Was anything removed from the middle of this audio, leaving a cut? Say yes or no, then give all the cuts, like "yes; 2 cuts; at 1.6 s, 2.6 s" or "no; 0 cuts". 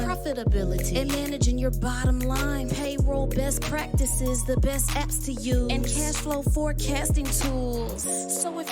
no; 0 cuts